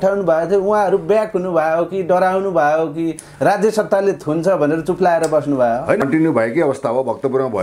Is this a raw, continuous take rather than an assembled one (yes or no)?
no